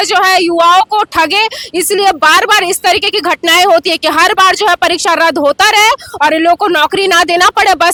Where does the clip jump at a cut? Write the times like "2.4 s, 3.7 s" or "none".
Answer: none